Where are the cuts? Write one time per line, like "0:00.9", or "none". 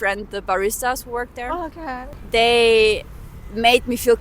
0:02.0